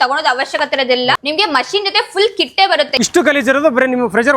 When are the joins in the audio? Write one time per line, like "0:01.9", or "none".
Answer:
0:01.2
0:02.9

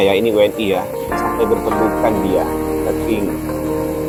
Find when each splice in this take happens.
none

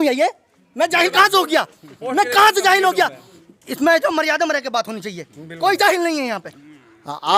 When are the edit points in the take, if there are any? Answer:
none

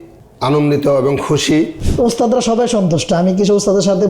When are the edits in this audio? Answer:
0:01.8

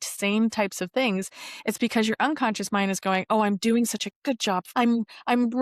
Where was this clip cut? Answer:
0:04.6

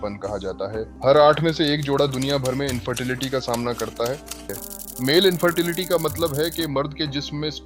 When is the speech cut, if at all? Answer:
0:00.9
0:04.6

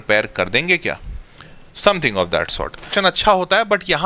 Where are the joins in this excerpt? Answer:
0:02.9

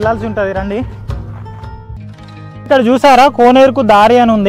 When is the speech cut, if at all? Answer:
0:02.0

